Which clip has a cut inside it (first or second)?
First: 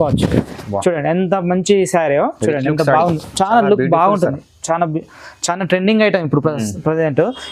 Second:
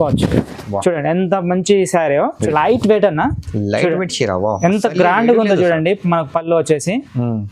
second